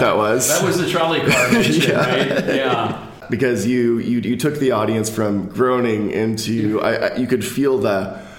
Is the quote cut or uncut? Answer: cut